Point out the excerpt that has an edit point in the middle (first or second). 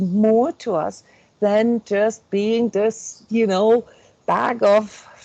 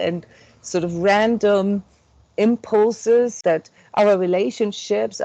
second